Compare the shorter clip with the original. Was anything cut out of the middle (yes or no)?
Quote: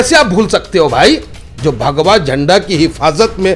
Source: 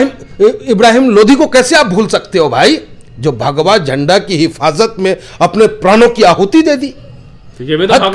no